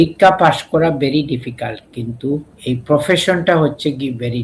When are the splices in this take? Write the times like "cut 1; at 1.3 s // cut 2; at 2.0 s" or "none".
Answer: cut 1; at 2.5 s